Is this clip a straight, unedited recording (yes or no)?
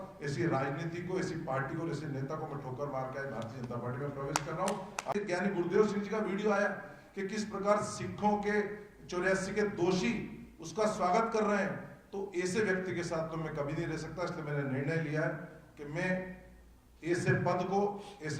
no